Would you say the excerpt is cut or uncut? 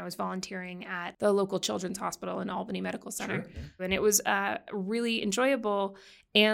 cut